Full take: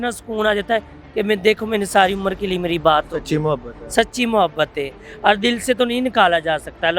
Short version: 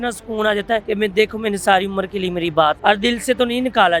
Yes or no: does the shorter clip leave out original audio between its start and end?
yes